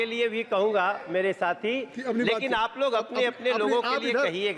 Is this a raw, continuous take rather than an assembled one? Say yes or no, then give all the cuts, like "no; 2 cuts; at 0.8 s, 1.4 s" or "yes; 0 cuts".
yes; 0 cuts